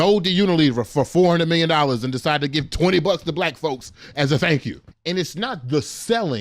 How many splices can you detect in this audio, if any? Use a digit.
1